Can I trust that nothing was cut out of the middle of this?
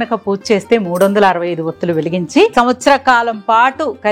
no; 1 cut; at 2.5 s

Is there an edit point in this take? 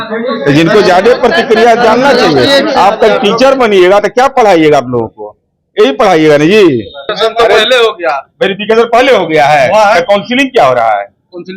yes; 1 cut; at 7.1 s

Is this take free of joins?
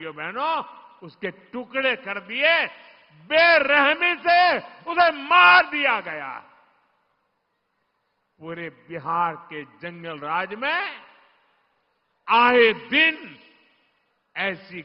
yes; 0 cuts

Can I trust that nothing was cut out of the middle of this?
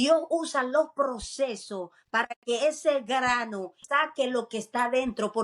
no; 1 cut; at 3.8 s

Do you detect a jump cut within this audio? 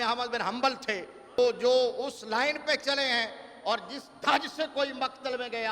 yes; 1 cut; at 1.4 s

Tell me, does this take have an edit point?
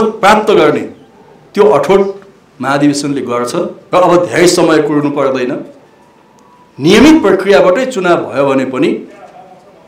yes; 1 cut; at 3.8 s

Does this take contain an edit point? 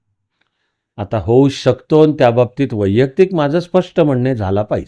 no; 0 cuts

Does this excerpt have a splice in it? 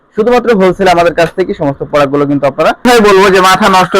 yes; 1 cut; at 2.8 s

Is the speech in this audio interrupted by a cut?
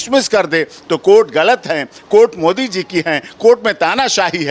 no; 0 cuts

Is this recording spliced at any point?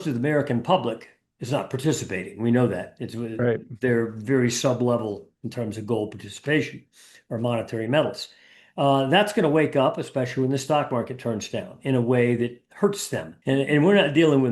yes; 1 cut; at 13.3 s

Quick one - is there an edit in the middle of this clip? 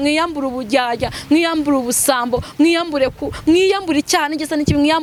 no; 0 cuts

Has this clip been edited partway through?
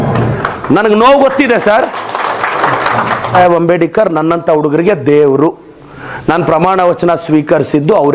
no; 0 cuts

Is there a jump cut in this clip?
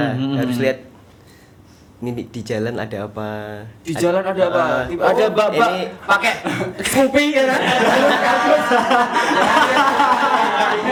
no; 0 cuts

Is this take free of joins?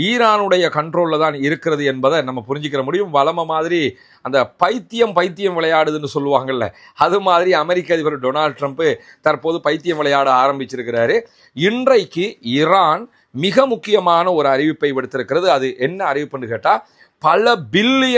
no; 1 cut; at 11.3 s

